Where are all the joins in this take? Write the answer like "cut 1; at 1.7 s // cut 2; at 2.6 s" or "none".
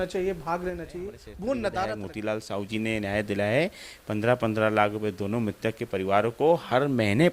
cut 1; at 2.1 s